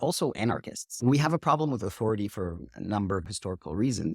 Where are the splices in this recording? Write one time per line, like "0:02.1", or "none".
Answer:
0:00.9
0:03.2

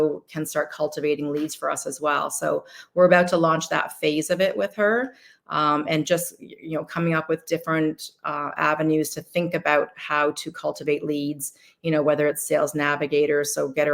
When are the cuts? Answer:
none

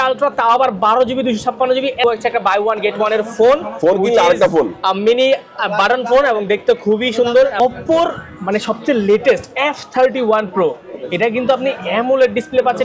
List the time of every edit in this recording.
0:02.0
0:07.6

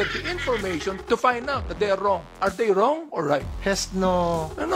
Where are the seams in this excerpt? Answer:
0:02.3
0:03.5

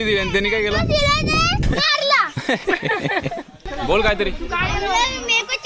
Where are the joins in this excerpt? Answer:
0:01.6
0:03.5

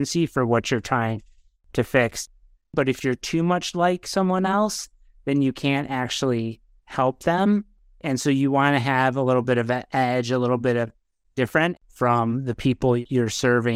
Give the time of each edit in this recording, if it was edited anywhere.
0:02.3
0:08.0
0:11.8
0:13.0

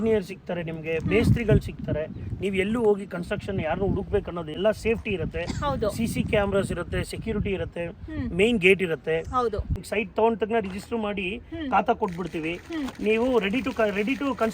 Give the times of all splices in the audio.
0:04.6
0:09.8

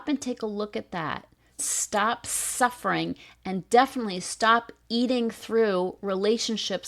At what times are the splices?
0:01.6

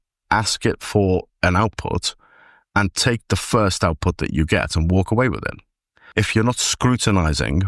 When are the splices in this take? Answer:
0:06.0

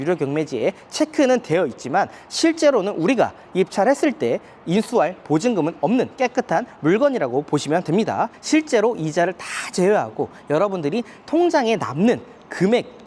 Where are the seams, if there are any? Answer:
0:08.3

